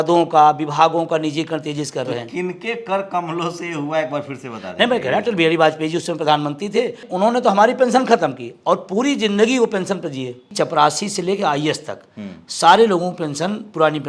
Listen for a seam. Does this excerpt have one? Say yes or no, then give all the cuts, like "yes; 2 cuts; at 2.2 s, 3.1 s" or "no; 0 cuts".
yes; 2 cuts; at 7.0 s, 10.4 s